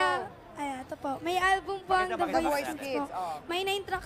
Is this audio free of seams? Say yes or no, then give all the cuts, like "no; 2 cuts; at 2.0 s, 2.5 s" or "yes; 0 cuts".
no; 1 cut; at 2.6 s